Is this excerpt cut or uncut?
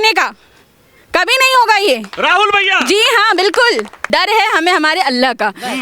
cut